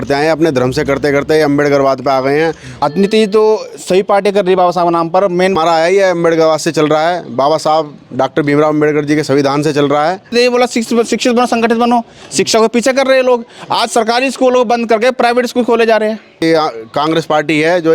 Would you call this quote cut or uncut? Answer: cut